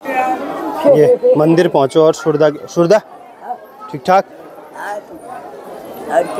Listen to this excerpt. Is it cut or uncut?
uncut